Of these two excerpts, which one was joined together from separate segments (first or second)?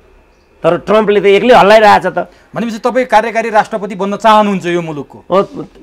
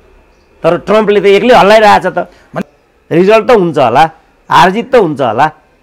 second